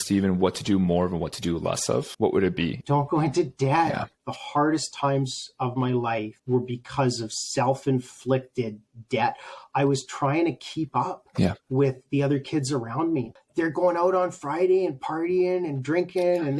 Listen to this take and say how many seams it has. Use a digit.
4